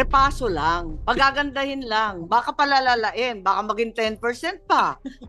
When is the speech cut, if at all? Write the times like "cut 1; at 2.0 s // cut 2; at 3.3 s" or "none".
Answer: cut 1; at 0.9 s

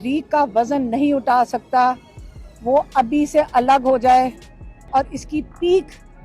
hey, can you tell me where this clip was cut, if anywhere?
cut 1; at 4.9 s

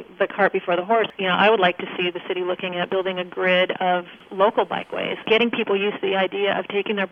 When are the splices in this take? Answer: cut 1; at 1.1 s // cut 2; at 2.9 s // cut 3; at 4.2 s // cut 4; at 5.2 s

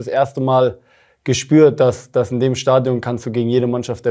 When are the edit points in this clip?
none

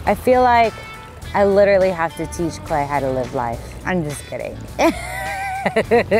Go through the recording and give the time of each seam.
cut 1; at 3.8 s

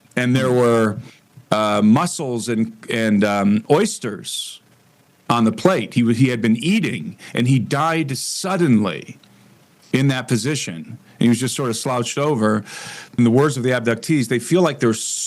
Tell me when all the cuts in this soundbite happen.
cut 1; at 13.1 s

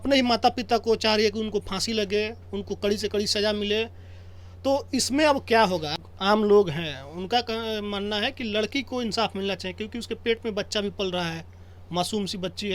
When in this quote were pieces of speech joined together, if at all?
cut 1; at 6.0 s

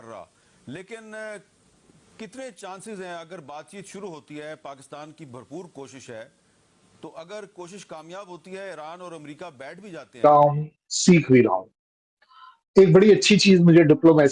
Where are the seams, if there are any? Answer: none

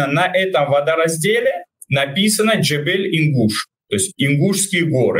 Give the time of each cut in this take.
cut 1; at 1.7 s // cut 2; at 3.7 s

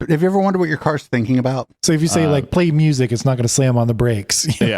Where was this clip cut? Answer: cut 1; at 1.7 s

